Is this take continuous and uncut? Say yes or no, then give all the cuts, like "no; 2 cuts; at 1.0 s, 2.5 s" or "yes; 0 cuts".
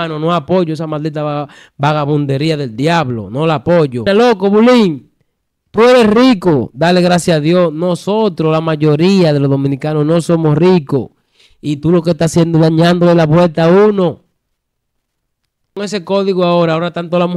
no; 2 cuts; at 4.0 s, 15.7 s